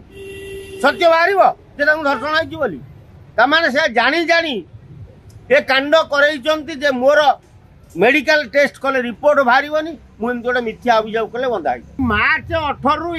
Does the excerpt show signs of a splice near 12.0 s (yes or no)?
yes